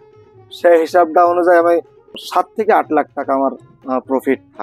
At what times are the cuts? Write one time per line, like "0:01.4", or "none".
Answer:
0:02.2
0:03.7